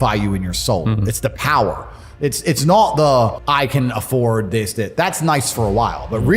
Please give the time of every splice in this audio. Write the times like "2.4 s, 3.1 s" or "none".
3.4 s